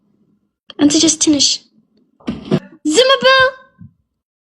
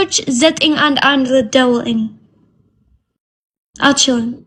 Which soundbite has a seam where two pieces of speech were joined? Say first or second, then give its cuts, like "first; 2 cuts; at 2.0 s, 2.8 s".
first; 1 cut; at 2.7 s